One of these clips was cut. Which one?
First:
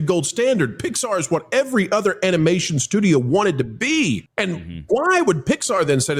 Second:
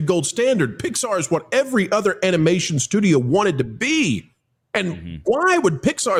first; 1 cut; at 4.3 s

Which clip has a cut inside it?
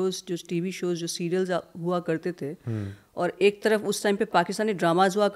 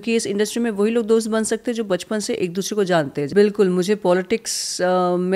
second; 1 cut; at 3.3 s

